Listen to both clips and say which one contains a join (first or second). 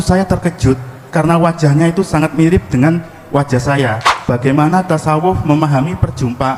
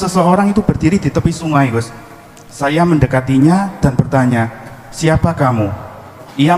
first